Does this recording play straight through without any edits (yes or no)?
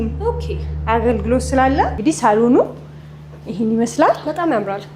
no